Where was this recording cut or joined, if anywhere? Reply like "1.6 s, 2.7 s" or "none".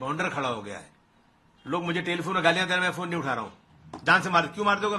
none